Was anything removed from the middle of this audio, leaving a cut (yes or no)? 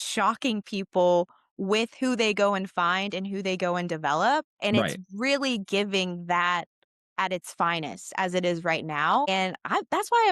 yes